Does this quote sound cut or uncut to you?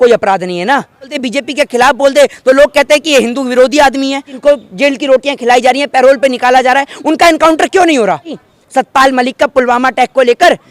cut